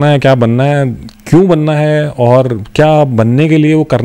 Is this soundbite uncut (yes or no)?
yes